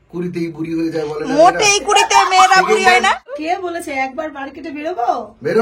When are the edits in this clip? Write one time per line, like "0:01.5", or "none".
0:03.4